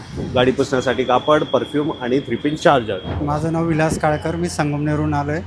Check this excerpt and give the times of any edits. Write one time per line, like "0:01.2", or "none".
0:03.1